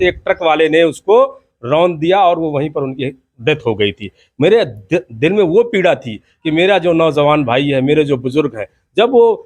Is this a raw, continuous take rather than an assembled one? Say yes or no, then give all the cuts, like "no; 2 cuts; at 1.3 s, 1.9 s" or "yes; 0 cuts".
yes; 0 cuts